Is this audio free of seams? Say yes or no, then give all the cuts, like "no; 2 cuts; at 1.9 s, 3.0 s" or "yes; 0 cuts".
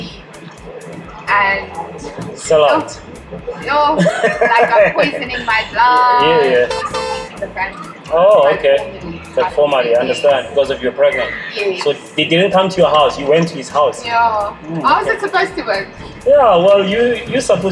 no; 1 cut; at 6.7 s